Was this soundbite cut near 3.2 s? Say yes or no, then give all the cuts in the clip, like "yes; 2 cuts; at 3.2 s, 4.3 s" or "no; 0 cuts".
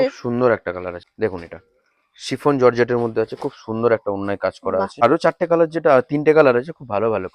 no; 2 cuts; at 1.0 s, 4.9 s